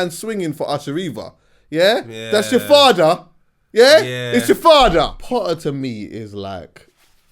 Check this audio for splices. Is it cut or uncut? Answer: cut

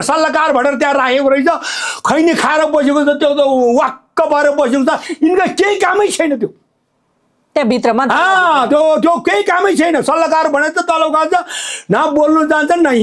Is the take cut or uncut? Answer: uncut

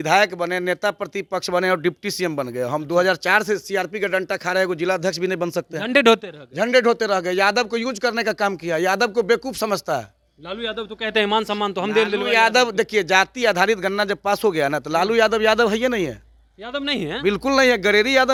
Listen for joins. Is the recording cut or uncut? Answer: uncut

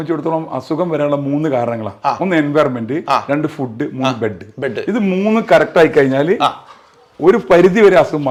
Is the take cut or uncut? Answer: uncut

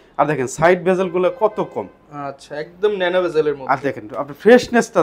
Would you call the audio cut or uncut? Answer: uncut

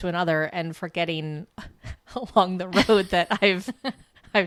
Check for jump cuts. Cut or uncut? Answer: uncut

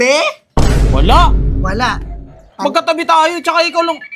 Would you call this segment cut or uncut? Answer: uncut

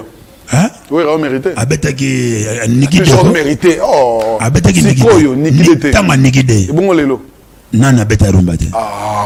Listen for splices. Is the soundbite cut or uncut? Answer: uncut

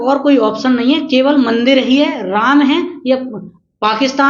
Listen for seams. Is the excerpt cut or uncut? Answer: uncut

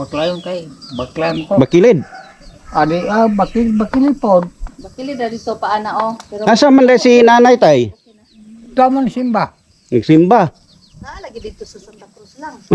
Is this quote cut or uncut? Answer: uncut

